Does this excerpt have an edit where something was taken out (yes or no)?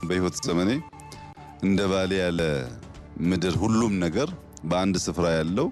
no